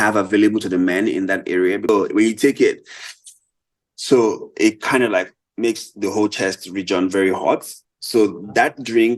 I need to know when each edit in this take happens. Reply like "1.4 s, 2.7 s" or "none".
1.9 s